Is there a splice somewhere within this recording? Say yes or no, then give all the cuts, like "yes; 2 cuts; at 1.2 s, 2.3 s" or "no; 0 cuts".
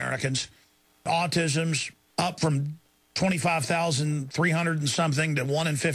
yes; 1 cut; at 1.0 s